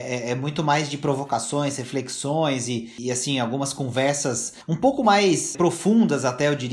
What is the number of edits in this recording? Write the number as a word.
three